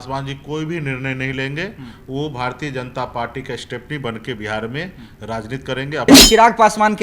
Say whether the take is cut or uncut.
cut